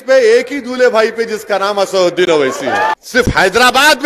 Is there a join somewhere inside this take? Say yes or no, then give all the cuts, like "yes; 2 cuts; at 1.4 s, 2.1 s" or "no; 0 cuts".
yes; 1 cut; at 2.9 s